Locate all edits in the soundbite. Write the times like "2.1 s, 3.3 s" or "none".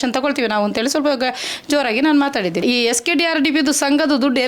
2.6 s